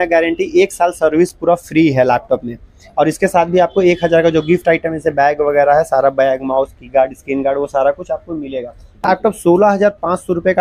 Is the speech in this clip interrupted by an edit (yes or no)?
yes